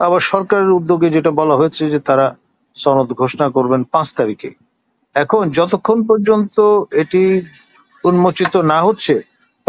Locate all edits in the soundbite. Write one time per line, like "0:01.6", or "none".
none